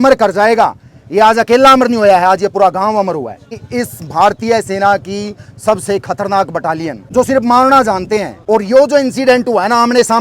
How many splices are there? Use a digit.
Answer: 3